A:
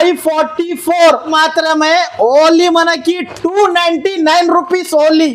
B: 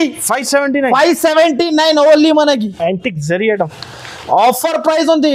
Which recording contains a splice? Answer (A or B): A